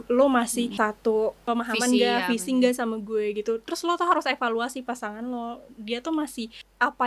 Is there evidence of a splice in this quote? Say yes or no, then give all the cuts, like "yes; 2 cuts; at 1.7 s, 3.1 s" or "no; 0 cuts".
no; 0 cuts